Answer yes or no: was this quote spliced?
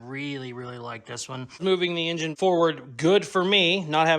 yes